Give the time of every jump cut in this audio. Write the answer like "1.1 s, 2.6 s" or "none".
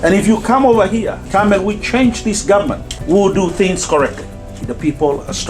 1.2 s, 2.9 s, 4.7 s